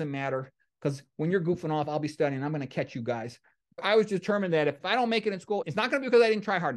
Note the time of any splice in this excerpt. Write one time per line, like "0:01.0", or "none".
0:03.8
0:04.8
0:05.6